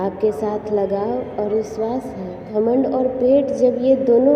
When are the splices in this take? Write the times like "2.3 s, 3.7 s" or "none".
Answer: 2.4 s